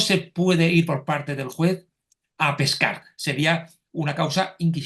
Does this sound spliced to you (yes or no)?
yes